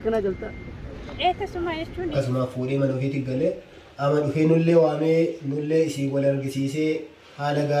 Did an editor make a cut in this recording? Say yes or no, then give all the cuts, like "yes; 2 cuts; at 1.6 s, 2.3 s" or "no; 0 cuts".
yes; 1 cut; at 2.1 s